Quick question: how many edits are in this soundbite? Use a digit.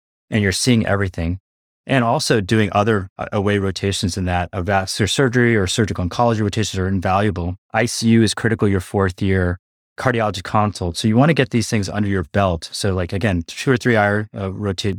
1